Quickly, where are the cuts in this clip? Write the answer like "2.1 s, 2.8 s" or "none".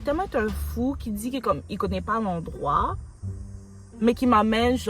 none